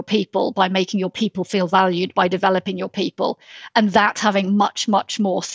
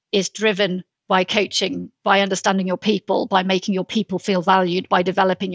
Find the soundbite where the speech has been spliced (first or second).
second